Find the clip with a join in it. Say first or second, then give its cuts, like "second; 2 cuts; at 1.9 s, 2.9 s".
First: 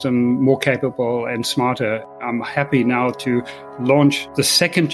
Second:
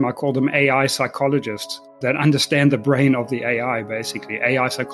first; 1 cut; at 2.1 s